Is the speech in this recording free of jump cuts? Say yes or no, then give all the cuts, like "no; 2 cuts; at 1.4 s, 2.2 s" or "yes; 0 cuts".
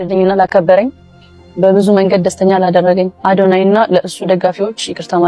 yes; 0 cuts